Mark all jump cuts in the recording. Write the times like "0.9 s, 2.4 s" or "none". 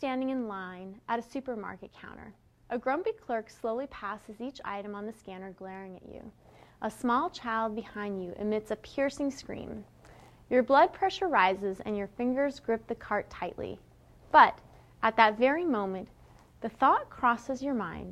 11.3 s